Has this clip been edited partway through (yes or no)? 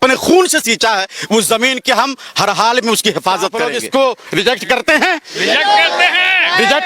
yes